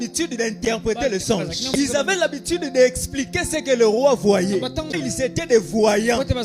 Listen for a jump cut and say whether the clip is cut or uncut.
cut